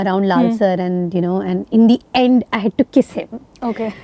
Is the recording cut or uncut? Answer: uncut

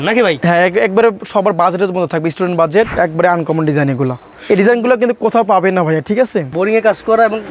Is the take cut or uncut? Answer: cut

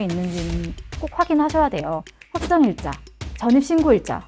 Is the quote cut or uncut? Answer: cut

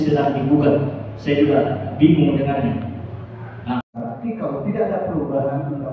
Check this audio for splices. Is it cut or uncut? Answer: cut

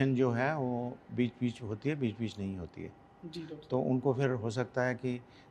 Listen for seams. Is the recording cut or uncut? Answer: uncut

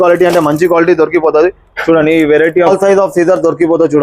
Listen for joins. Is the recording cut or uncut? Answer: cut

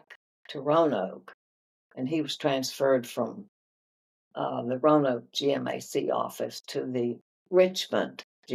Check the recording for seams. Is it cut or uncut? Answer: uncut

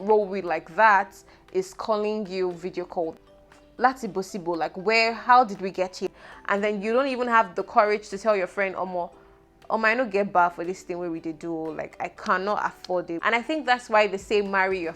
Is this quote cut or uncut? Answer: cut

